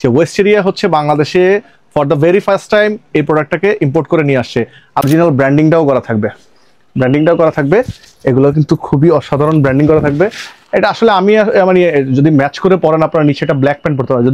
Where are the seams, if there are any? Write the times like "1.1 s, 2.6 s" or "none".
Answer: 5.1 s